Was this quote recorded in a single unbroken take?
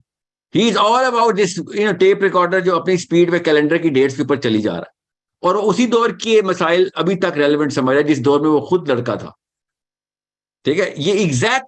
yes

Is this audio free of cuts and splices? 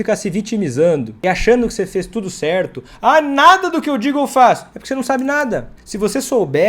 no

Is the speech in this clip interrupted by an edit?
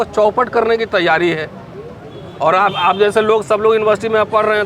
no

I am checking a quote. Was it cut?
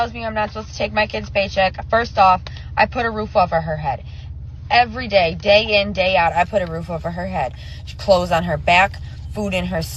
yes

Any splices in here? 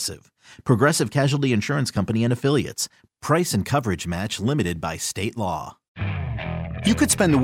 yes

